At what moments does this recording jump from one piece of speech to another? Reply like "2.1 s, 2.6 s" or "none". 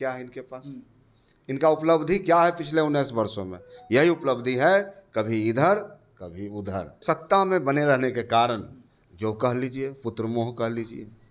7.0 s